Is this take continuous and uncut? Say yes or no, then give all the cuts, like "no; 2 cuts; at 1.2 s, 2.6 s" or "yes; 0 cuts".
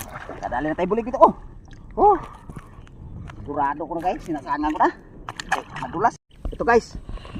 no; 1 cut; at 6.1 s